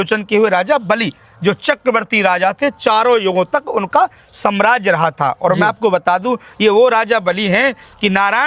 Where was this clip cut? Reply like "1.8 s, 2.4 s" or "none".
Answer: none

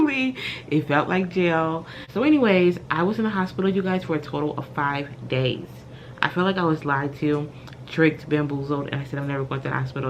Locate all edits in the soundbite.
1.7 s

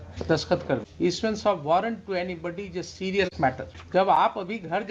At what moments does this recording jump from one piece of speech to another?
0.9 s, 3.7 s

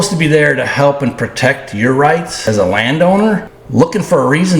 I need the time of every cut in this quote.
2.4 s, 3.6 s

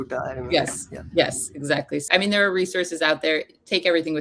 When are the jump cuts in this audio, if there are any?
2.1 s

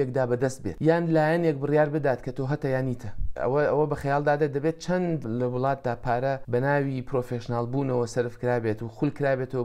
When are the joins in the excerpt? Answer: 3.3 s, 5.3 s

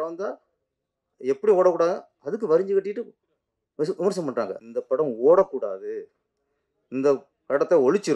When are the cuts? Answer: 4.6 s

